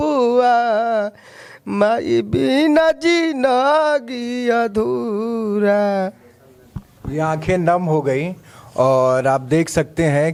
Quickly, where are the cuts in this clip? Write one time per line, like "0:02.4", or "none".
none

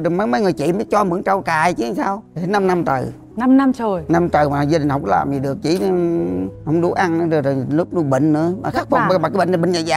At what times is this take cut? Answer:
0:02.3

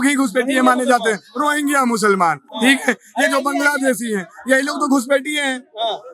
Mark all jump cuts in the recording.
none

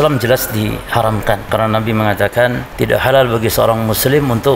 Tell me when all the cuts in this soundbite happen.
0:01.4
0:02.7

